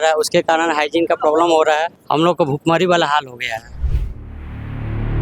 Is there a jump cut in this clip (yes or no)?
yes